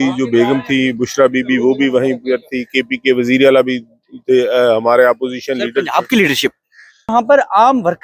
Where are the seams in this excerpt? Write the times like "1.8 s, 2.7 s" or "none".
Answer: 7.1 s

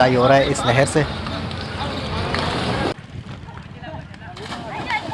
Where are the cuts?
none

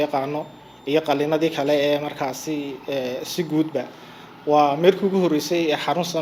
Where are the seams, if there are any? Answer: none

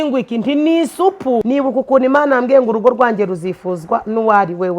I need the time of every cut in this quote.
1.4 s

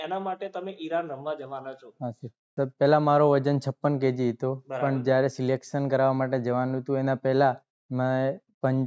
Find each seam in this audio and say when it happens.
2.4 s

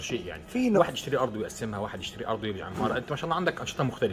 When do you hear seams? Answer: none

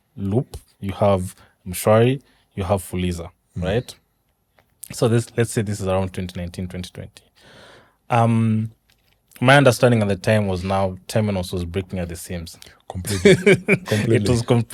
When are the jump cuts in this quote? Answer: none

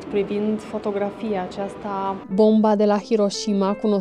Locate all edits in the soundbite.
2.2 s

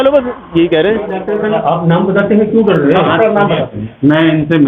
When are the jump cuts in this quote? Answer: 1.2 s

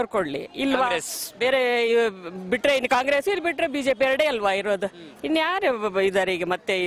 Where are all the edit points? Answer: none

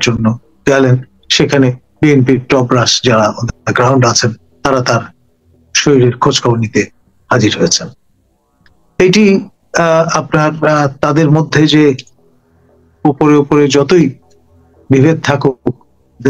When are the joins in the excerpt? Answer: none

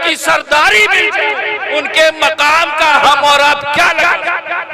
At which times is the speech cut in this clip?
3.0 s

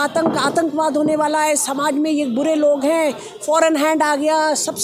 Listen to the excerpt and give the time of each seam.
none

